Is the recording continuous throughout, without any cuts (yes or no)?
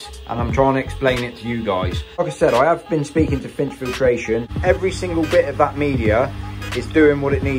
no